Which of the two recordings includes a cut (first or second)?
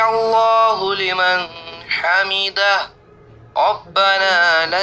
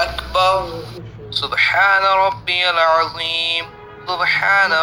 second